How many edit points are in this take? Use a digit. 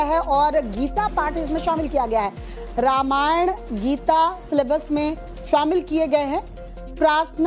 1